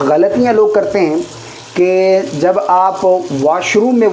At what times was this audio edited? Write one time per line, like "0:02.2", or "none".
none